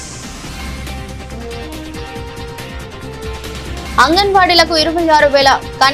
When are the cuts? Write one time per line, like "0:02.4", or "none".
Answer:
0:01.5
0:04.0